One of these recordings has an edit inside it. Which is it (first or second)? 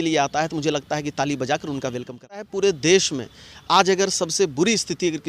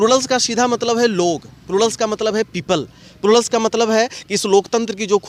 first